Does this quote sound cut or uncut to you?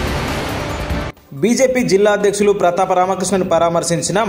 cut